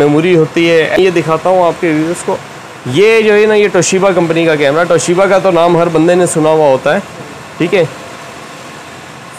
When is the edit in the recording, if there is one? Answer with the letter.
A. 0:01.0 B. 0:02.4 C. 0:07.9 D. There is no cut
A